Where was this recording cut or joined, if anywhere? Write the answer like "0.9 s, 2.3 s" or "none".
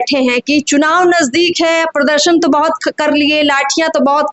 none